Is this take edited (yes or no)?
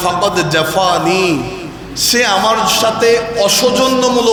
no